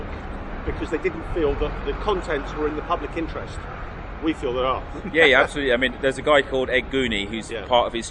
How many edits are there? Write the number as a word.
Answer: zero